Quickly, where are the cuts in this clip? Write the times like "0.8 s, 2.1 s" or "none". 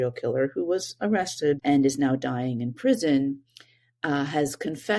1.6 s